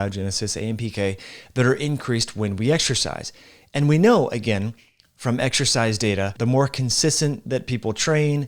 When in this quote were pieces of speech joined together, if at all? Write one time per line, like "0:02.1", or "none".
0:06.3